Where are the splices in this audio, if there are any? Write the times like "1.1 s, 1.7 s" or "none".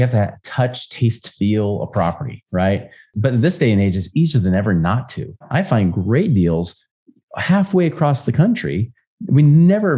3.1 s, 5.4 s